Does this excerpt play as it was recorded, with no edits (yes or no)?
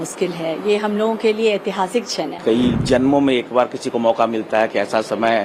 no